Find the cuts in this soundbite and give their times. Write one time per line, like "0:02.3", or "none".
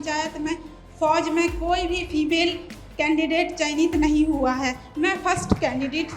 none

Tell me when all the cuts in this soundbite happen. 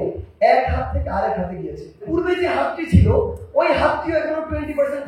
0:02.0

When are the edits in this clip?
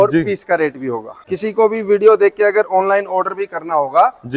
0:01.2

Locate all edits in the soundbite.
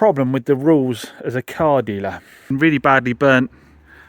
0:02.5

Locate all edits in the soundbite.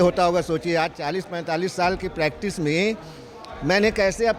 none

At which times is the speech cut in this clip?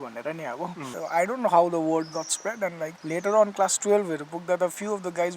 0:00.9
0:03.0

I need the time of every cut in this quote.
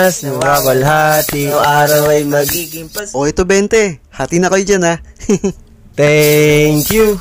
0:01.5

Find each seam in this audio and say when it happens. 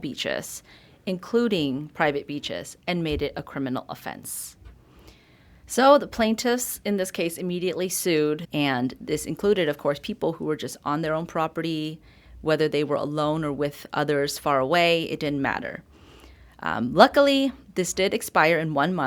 0:08.4

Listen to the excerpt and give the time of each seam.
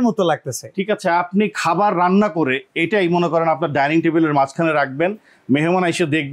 none

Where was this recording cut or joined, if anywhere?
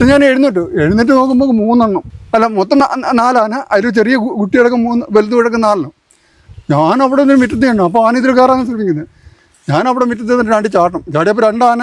0:02.1

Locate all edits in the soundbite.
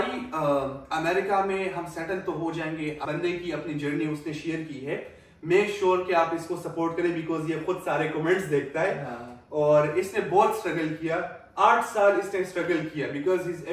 0:03.0

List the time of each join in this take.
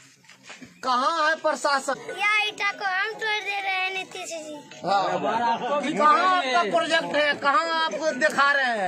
0:01.9

